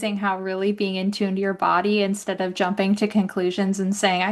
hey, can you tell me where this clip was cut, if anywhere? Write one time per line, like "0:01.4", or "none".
none